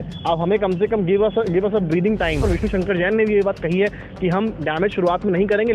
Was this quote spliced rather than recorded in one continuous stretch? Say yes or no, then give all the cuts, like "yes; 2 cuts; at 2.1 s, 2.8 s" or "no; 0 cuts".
yes; 1 cut; at 2.4 s